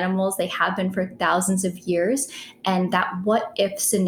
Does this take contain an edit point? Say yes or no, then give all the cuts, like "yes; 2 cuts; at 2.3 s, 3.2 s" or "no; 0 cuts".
no; 0 cuts